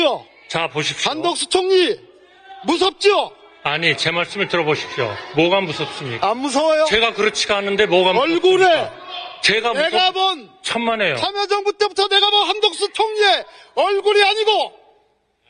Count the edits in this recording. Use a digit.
0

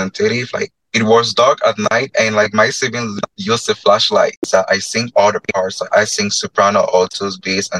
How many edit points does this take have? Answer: 1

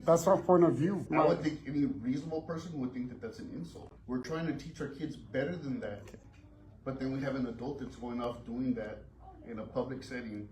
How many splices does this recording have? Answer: 2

